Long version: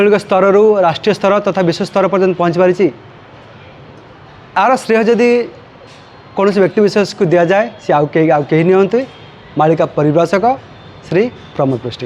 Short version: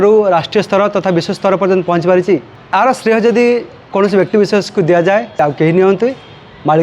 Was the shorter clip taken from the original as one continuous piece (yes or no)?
no